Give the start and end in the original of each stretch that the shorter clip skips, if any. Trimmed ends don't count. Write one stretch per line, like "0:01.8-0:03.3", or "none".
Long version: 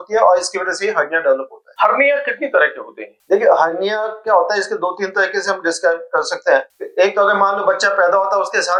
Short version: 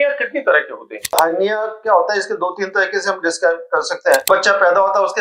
0:03.2-0:03.6
0:06.6-0:07.6